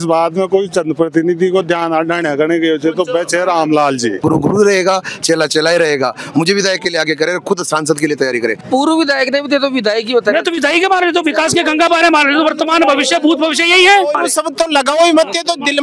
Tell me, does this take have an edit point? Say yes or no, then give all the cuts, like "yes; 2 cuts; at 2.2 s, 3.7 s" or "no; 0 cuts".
yes; 2 cuts; at 4.2 s, 8.6 s